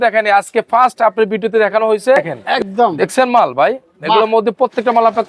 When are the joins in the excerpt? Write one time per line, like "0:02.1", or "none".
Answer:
0:02.4

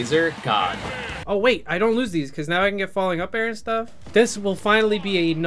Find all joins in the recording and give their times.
0:01.1
0:04.0

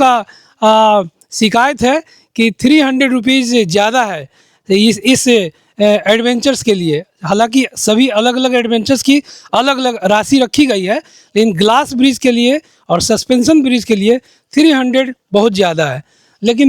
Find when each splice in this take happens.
none

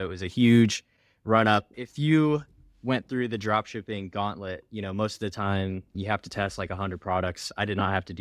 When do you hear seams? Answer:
0:01.8
0:05.9

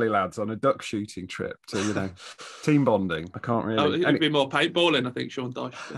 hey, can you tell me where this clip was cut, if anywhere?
0:03.3

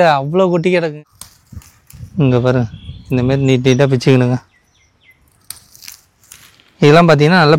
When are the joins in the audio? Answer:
0:01.0

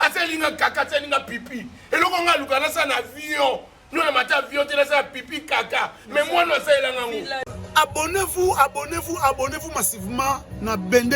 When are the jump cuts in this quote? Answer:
0:07.4

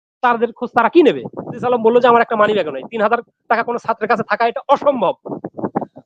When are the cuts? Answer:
0:01.6

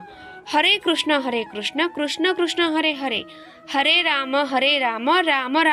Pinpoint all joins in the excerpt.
none

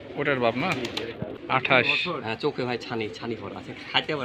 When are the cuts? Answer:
0:01.3

